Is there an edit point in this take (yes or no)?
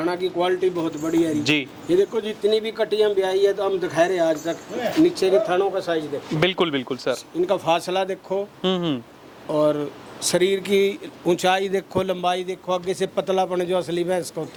no